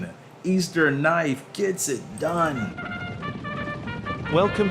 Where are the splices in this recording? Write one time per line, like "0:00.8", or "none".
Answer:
0:02.7